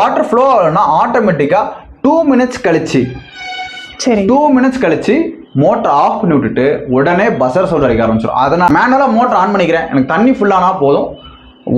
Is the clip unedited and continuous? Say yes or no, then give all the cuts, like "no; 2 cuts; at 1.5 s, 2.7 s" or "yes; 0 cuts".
no; 1 cut; at 8.7 s